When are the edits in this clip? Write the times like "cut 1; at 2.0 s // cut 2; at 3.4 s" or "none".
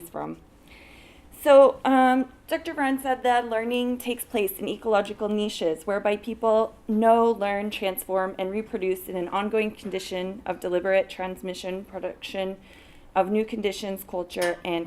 cut 1; at 7.5 s